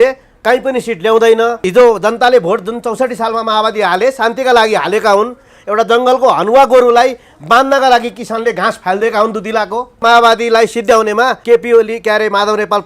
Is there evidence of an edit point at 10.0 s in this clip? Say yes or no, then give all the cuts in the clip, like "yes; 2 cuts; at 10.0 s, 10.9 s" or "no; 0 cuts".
yes; 3 cuts; at 1.7 s, 10.0 s, 11.4 s